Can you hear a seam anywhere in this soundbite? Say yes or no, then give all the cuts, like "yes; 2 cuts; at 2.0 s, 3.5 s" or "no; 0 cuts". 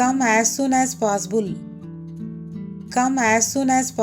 yes; 2 cuts; at 1.6 s, 2.9 s